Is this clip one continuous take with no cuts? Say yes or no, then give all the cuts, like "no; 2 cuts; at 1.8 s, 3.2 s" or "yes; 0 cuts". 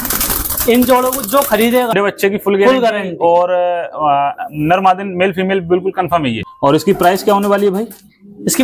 no; 2 cuts; at 1.9 s, 6.4 s